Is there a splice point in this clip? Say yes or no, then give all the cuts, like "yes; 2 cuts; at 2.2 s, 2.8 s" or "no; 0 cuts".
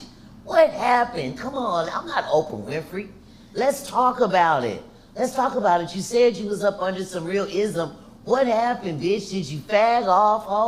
no; 0 cuts